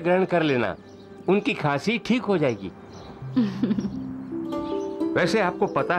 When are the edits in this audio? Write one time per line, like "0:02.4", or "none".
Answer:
none